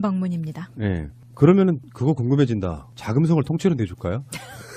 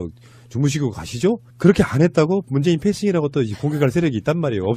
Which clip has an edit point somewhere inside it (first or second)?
second